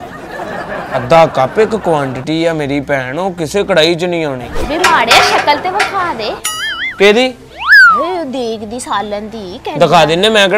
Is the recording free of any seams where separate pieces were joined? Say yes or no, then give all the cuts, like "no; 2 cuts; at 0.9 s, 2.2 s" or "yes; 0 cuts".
no; 1 cut; at 4.5 s